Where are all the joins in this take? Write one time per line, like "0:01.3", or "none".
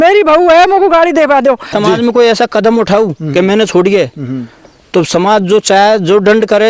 0:01.7